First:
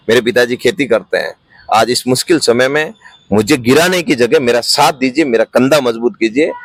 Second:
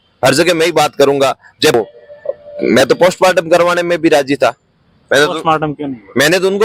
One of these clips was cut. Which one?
second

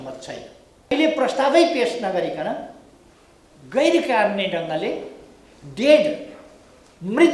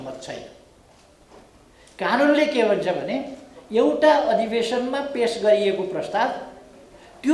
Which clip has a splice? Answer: first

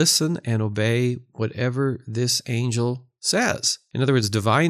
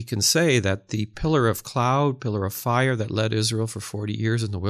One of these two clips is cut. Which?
first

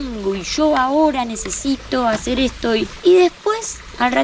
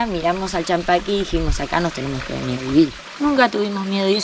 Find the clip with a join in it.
second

